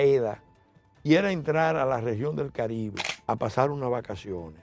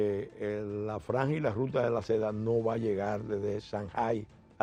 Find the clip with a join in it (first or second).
first